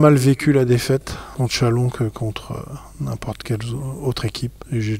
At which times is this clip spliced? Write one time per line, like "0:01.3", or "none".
0:01.2
0:04.2